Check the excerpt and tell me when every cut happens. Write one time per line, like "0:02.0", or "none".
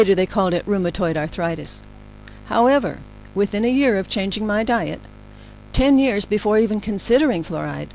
0:06.7